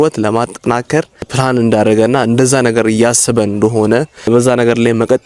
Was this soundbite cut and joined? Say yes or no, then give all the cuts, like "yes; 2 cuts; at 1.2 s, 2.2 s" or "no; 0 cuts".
yes; 2 cuts; at 1.3 s, 4.3 s